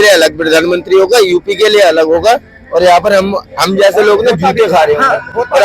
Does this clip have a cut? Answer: no; 0 cuts

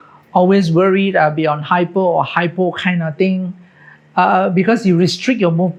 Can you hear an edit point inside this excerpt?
no; 0 cuts

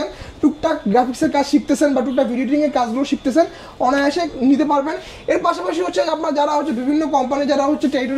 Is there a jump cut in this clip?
no; 0 cuts

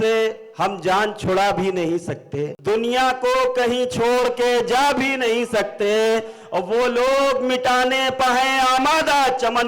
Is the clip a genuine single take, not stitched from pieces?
no; 1 cut; at 2.5 s

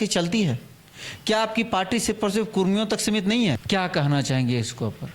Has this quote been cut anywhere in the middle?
yes; 1 cut; at 3.6 s

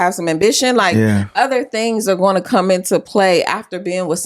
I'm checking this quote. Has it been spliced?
no; 0 cuts

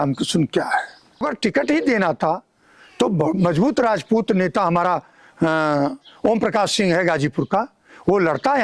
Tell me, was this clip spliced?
yes; 1 cut; at 1.2 s

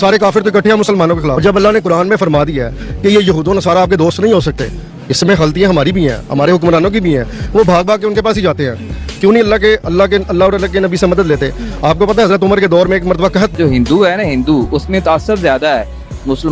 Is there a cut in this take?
no; 0 cuts

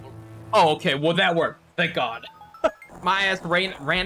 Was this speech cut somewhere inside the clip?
yes; 1 cut; at 2.9 s

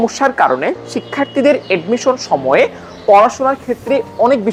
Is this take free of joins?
yes; 0 cuts

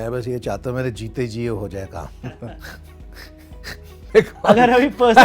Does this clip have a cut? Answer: no; 0 cuts

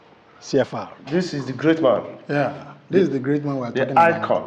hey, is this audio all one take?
no; 1 cut; at 1.0 s

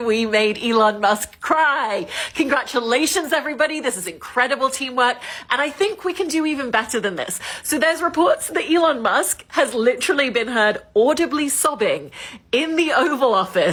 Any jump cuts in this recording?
no; 0 cuts

